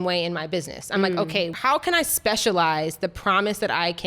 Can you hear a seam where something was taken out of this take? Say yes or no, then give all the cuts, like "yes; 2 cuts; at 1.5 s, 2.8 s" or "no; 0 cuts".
yes; 1 cut; at 1.5 s